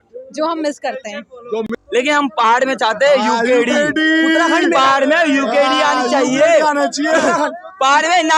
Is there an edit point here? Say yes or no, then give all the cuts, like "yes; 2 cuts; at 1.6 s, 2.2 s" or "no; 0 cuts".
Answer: yes; 1 cut; at 1.7 s